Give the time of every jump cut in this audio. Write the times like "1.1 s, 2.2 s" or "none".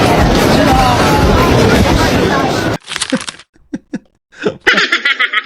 none